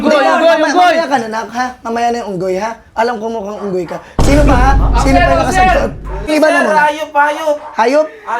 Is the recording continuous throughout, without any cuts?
no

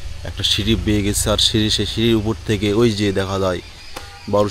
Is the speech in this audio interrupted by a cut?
no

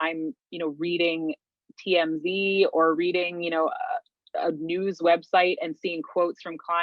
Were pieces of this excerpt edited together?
no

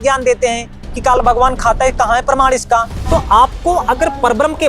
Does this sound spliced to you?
yes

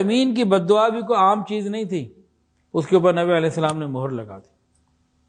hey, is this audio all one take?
yes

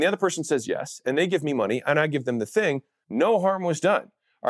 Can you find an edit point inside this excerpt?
yes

